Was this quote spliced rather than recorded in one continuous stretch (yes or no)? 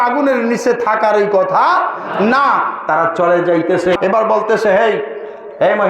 yes